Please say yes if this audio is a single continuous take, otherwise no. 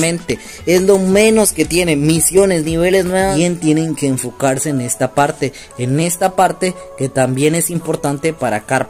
no